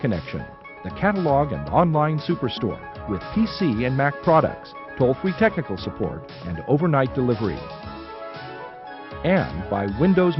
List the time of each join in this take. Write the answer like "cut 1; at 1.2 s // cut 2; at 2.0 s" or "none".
none